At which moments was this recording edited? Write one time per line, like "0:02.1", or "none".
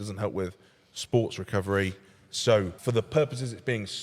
0:02.7